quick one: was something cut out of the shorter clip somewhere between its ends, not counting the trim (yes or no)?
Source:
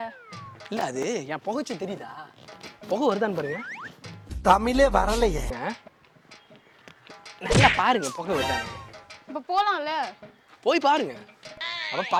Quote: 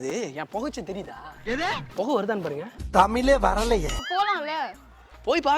yes